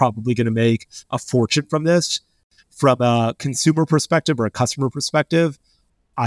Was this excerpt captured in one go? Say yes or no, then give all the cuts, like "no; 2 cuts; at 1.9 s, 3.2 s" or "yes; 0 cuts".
no; 1 cut; at 2.4 s